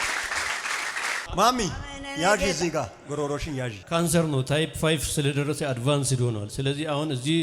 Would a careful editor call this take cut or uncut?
cut